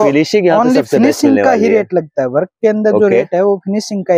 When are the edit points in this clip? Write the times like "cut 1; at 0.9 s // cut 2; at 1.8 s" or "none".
none